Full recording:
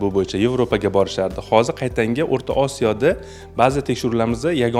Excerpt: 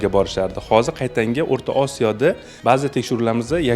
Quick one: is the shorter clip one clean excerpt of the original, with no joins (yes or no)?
no